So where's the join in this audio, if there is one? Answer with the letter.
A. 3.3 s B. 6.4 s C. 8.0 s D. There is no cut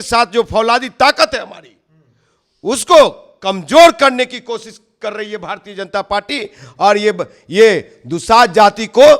D